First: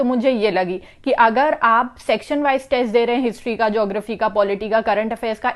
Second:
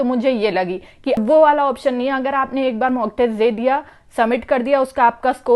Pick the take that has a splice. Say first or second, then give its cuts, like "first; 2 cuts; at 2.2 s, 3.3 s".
second; 1 cut; at 1.2 s